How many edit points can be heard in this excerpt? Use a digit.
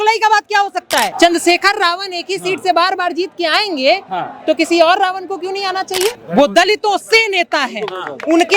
2